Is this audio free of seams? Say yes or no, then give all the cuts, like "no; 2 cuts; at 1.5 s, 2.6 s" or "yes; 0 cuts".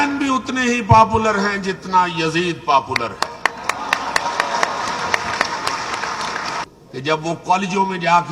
no; 1 cut; at 6.7 s